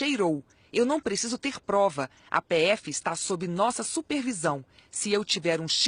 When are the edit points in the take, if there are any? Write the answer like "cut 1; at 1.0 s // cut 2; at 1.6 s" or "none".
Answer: none